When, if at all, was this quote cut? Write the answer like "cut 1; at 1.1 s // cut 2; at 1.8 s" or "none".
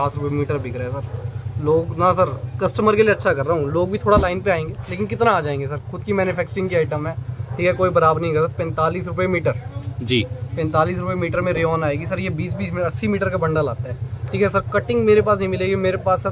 none

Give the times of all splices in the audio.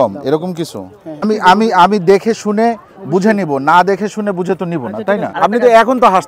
cut 1; at 1.3 s // cut 2; at 5.3 s

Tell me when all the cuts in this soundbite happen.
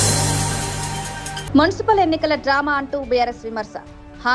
cut 1; at 1.0 s

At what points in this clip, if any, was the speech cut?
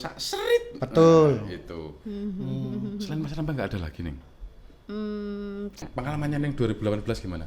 cut 1; at 5.8 s

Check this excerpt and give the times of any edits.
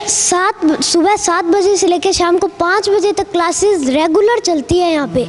none

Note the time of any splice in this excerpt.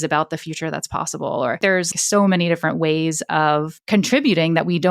cut 1; at 1.9 s // cut 2; at 3.8 s

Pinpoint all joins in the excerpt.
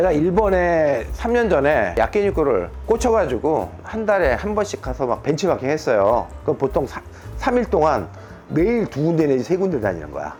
none

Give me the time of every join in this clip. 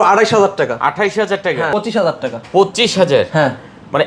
cut 1; at 1.7 s

